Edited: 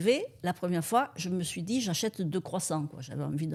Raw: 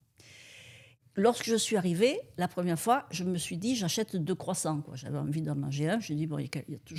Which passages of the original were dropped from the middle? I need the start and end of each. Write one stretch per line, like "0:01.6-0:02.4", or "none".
none

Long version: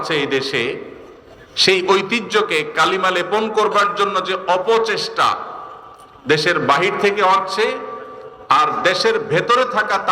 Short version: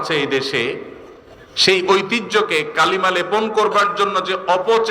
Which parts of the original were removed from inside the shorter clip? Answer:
none

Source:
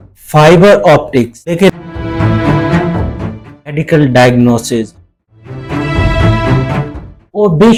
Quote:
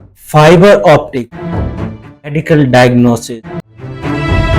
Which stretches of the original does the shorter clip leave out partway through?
0:01.4-0:02.8
0:04.7-0:04.9

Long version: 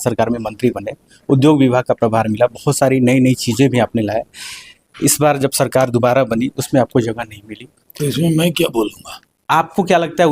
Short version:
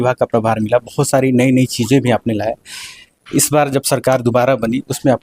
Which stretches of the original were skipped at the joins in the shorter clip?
none

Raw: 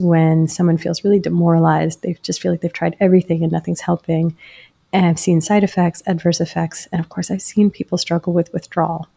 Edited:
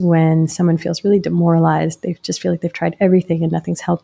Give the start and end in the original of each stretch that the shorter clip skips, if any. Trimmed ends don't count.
none

